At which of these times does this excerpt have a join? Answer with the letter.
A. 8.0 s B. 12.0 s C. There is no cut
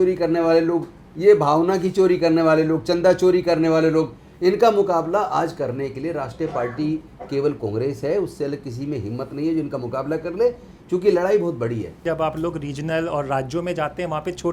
B